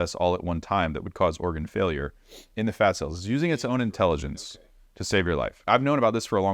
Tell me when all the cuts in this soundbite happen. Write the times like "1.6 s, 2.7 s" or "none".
5.6 s